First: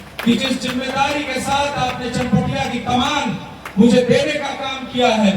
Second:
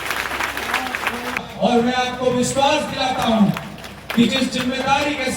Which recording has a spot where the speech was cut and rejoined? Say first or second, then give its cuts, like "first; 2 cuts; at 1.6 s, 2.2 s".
second; 1 cut; at 1.5 s